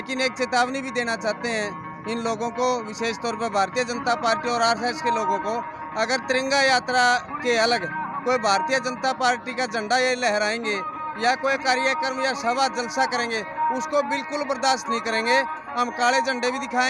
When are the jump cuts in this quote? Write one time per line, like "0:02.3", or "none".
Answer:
none